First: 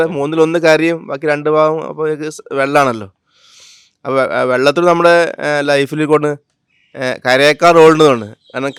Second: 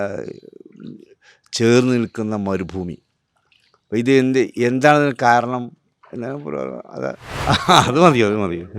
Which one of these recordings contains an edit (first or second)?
second